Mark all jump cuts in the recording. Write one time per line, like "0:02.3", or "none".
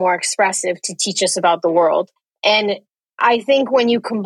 0:02.2